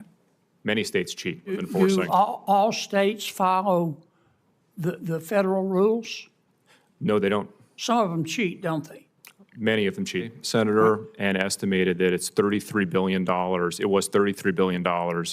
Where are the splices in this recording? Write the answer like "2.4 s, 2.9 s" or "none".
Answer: 1.6 s, 10.4 s